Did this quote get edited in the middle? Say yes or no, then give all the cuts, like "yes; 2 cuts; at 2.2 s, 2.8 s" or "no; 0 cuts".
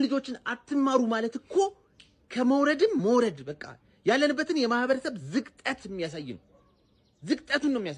no; 0 cuts